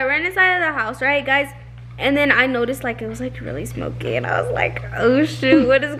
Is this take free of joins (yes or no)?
yes